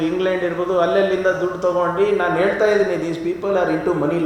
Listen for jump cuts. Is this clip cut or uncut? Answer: uncut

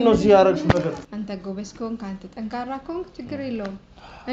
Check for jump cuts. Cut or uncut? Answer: cut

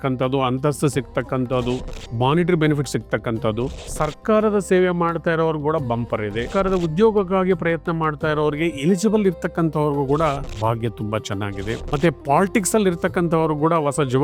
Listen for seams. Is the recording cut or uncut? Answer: cut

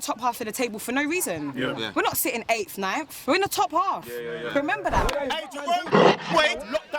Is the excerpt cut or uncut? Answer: cut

